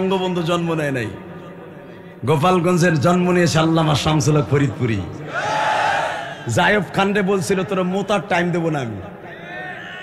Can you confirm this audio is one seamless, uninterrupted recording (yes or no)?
yes